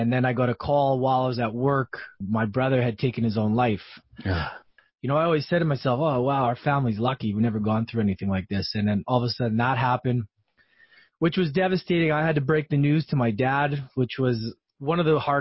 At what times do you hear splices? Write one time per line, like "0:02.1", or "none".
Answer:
0:02.2
0:04.6